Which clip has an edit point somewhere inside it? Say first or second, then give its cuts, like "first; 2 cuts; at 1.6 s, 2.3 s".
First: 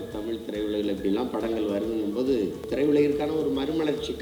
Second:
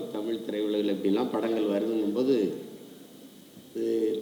first; 1 cut; at 2.7 s